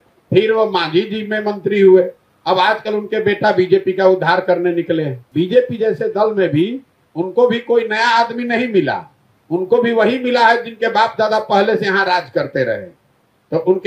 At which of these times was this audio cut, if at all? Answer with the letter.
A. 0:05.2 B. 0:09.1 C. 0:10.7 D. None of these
A